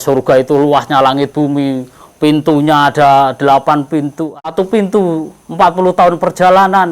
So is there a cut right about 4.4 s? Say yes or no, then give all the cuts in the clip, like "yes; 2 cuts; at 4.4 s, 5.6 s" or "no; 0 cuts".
yes; 1 cut; at 4.4 s